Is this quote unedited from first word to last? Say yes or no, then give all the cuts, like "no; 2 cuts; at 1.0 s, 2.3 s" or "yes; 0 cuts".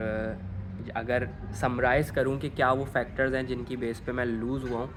yes; 0 cuts